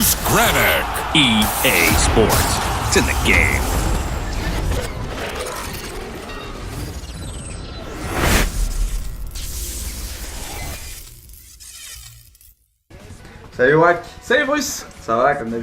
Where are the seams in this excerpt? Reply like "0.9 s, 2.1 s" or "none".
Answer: 12.1 s